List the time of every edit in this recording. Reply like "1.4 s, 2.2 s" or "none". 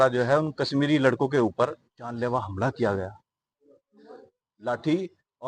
none